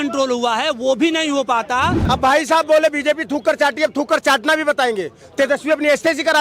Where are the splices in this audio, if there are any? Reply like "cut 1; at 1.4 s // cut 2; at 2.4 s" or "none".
cut 1; at 2.0 s